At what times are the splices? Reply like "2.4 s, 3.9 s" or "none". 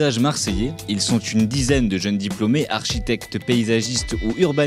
none

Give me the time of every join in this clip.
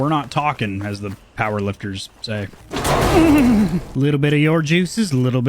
2.5 s, 3.8 s

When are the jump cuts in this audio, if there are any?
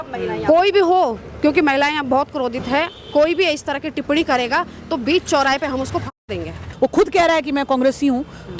6.6 s

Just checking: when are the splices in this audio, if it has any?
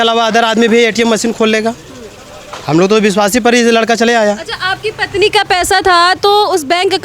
none

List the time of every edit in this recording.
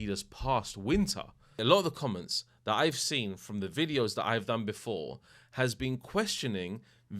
1.4 s

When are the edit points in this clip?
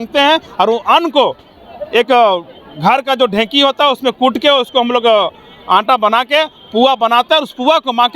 none

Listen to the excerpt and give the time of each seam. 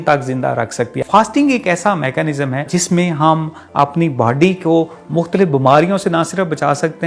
1.0 s, 2.7 s

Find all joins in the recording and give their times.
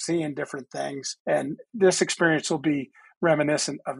1.6 s

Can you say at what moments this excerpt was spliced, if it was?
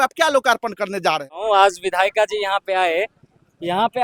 1.3 s

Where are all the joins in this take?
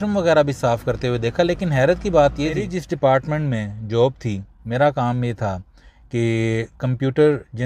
2.7 s

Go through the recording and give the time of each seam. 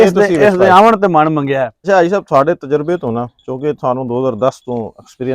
1.7 s

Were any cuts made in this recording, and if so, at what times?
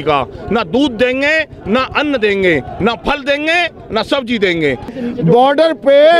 4.9 s

